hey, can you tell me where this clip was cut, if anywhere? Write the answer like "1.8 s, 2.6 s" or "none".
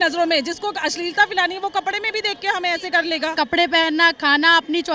3.3 s